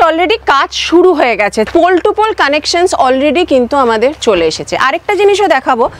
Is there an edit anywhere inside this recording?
yes; 1 cut; at 1.7 s

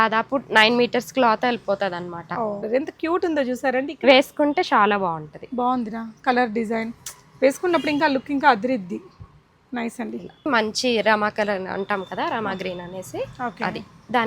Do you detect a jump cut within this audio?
yes; 2 cuts; at 2.6 s, 10.5 s

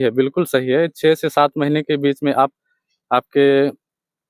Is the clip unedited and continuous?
yes; 0 cuts

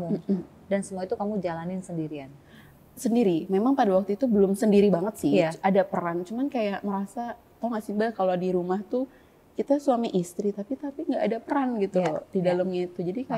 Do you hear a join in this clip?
no; 0 cuts

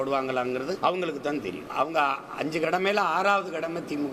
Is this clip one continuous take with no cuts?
no; 2 cuts; at 0.8 s, 1.6 s

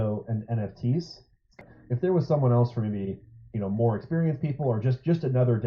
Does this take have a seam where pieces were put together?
yes; 1 cut; at 1.6 s

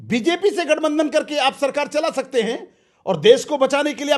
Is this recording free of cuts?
yes; 0 cuts

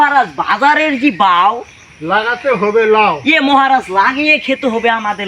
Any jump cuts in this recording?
no; 0 cuts

